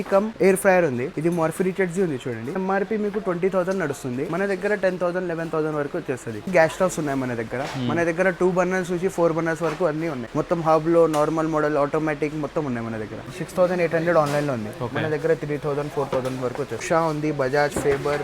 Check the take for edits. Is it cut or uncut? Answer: cut